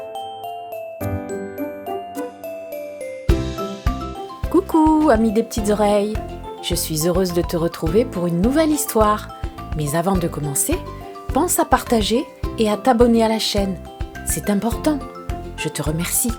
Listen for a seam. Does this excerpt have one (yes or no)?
no